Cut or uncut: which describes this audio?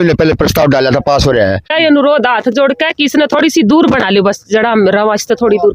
cut